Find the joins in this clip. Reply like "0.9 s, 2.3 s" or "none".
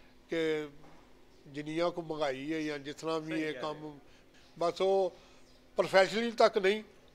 4.2 s